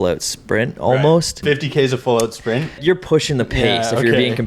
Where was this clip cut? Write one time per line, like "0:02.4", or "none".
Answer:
0:01.4
0:02.8